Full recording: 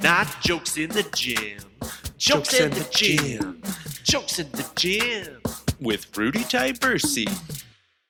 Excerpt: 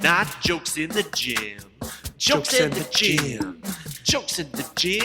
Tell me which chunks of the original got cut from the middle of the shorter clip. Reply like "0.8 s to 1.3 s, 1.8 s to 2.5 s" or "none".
none